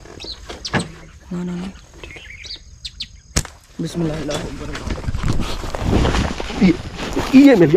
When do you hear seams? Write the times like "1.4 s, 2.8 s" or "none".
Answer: none